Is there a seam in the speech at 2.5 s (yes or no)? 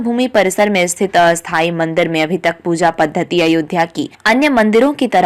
no